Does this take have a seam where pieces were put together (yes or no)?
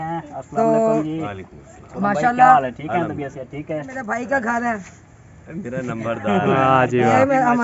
yes